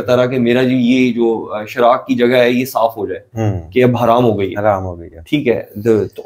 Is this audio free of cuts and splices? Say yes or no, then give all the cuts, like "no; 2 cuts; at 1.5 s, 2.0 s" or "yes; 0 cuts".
yes; 0 cuts